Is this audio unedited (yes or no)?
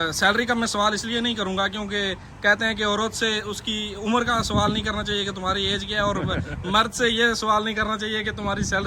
yes